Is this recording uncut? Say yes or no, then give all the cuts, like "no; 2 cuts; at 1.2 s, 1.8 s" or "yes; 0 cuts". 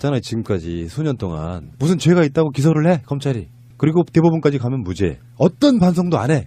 no; 1 cut; at 5.1 s